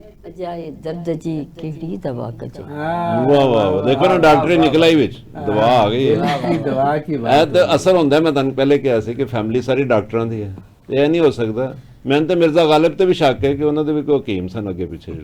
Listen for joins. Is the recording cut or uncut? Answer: uncut